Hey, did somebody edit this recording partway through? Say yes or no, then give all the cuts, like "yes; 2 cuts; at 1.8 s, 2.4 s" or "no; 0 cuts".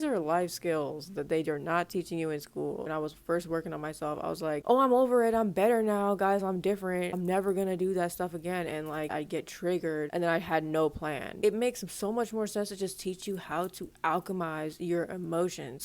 yes; 3 cuts; at 2.9 s, 10.1 s, 11.3 s